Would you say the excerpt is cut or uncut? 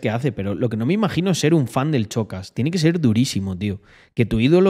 uncut